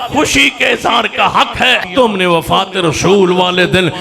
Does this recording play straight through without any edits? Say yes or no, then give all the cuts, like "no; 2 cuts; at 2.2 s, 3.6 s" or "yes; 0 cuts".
no; 1 cut; at 1.8 s